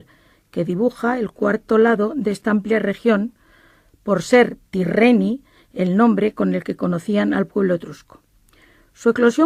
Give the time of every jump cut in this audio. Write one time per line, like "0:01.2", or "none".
none